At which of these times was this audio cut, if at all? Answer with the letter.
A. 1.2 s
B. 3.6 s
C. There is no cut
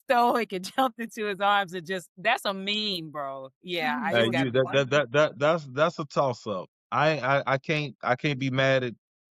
C